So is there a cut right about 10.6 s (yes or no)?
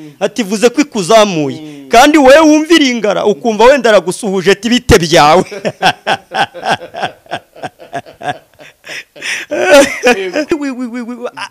yes